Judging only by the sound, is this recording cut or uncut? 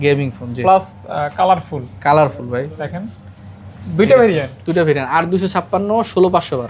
uncut